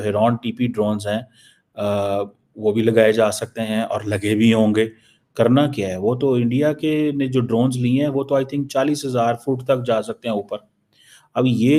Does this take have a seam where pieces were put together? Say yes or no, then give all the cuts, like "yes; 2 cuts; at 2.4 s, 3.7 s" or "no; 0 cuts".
no; 0 cuts